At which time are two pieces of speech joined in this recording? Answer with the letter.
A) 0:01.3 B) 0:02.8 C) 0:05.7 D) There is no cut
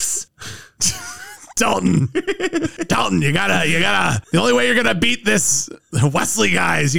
B